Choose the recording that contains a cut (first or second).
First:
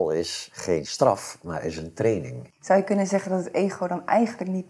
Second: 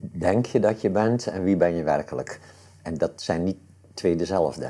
first